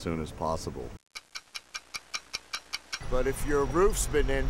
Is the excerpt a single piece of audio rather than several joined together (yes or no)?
no